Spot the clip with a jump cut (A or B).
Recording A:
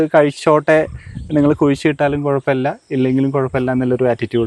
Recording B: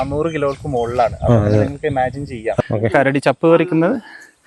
B